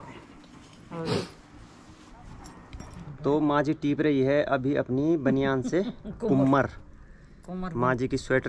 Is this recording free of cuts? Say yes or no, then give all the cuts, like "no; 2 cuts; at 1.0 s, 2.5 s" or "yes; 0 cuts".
no; 1 cut; at 2.9 s